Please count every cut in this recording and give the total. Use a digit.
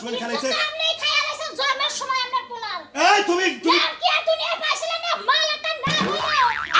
0